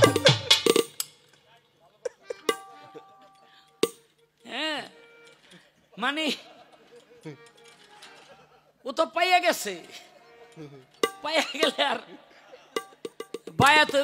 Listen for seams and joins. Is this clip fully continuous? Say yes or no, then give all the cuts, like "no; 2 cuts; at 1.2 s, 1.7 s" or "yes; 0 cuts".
yes; 0 cuts